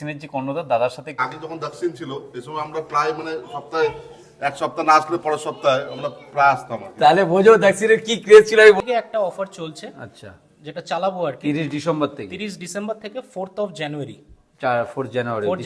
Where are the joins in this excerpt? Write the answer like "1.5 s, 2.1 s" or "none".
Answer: 1.2 s, 8.8 s